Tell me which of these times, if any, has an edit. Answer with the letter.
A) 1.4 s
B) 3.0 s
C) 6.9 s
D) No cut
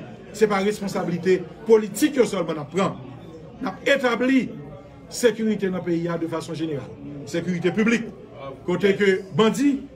D